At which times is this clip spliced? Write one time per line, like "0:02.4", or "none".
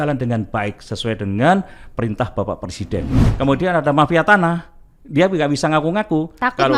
0:03.3